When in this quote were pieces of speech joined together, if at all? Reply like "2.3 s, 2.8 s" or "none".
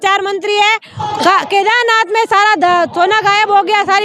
0.9 s